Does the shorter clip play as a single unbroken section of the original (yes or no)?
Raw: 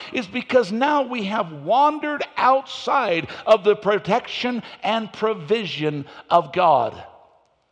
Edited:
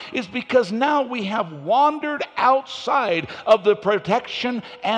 yes